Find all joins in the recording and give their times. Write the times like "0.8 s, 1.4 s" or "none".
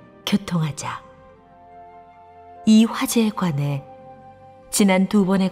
none